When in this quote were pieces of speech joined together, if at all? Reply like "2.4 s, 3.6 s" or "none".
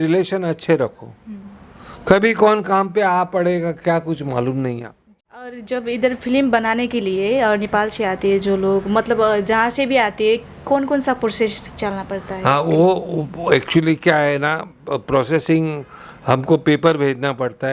5.6 s

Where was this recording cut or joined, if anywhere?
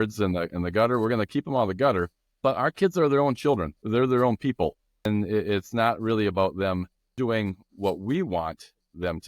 2.2 s, 5.1 s, 7.0 s

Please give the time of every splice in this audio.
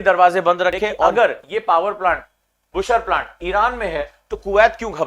1.1 s

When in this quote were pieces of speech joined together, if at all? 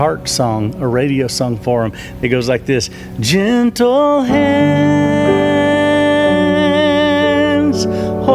none

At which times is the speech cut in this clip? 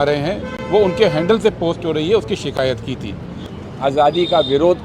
3.5 s

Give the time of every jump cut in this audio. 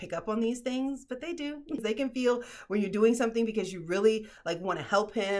1.8 s

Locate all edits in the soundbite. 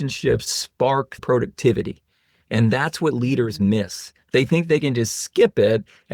0.9 s

